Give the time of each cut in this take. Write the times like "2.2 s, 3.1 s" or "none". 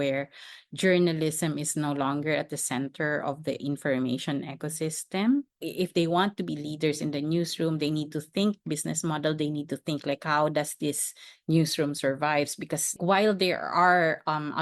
5.6 s, 13.0 s